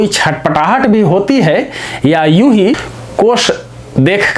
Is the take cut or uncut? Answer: uncut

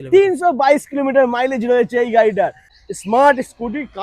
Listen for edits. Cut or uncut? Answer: cut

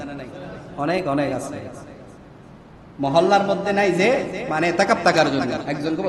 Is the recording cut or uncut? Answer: uncut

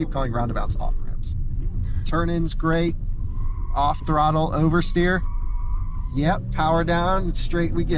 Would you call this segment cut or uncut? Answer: uncut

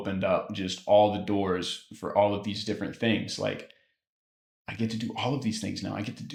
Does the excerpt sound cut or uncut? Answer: uncut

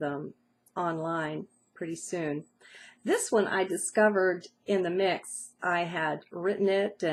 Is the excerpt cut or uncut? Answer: uncut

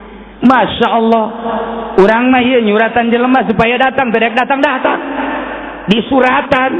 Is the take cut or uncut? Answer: uncut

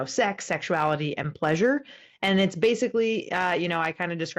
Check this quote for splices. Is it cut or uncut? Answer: uncut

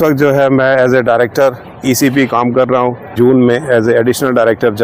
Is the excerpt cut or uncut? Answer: cut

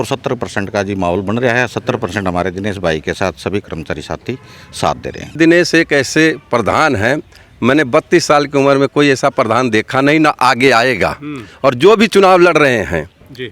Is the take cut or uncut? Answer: cut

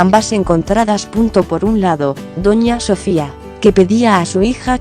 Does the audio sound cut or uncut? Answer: cut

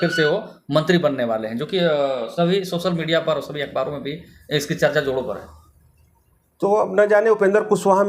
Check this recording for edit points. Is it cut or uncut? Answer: uncut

